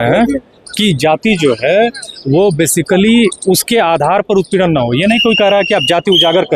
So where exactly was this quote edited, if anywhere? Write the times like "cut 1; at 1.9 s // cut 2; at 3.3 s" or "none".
none